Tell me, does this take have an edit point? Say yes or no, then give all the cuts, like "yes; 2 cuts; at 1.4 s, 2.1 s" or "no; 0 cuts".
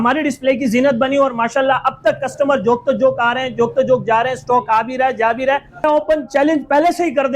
yes; 1 cut; at 5.8 s